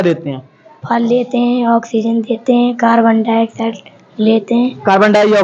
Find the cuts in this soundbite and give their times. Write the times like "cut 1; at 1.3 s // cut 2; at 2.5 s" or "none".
none